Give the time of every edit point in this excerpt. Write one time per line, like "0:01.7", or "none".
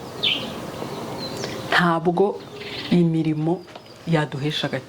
none